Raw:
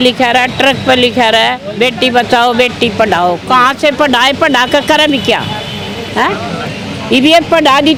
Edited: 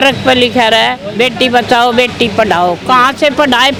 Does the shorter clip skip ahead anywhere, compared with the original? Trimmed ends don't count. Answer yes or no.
no